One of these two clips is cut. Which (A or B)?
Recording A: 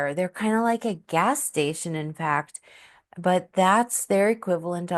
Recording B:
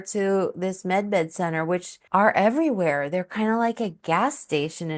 B